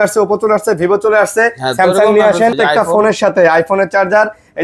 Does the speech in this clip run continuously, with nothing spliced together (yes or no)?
no